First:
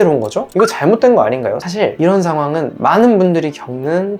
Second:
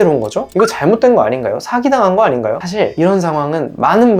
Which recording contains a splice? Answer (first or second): first